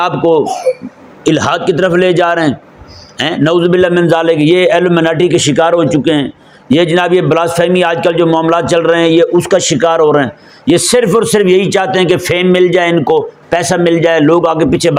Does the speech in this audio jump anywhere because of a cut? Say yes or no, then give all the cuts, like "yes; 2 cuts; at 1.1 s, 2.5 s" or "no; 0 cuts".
no; 0 cuts